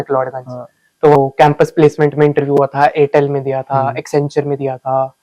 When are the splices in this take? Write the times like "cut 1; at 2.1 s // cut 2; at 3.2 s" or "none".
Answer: cut 1; at 1.1 s